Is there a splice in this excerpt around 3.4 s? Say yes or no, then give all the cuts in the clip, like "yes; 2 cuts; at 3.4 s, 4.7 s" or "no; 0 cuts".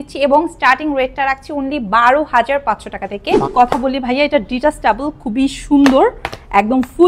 yes; 1 cut; at 3.4 s